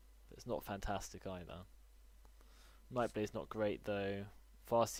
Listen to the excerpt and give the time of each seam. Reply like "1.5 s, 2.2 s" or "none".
none